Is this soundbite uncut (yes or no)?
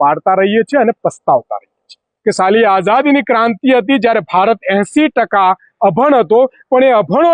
no